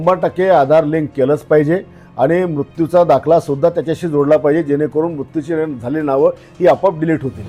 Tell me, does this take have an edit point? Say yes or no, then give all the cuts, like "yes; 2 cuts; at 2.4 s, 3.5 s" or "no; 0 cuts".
no; 0 cuts